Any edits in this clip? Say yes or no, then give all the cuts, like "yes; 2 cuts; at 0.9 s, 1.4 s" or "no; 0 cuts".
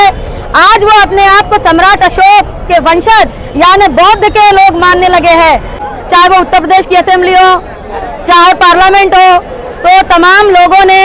yes; 1 cut; at 5.9 s